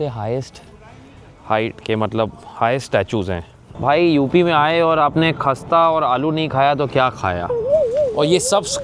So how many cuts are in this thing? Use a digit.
2